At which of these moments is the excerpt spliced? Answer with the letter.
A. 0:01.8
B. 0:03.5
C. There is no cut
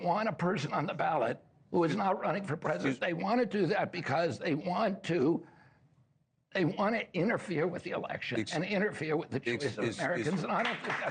A